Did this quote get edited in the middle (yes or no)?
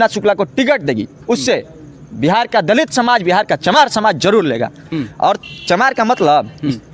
no